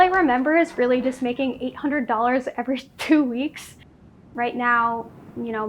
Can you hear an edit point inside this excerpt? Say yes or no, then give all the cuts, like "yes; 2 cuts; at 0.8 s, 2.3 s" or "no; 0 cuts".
yes; 1 cut; at 3.7 s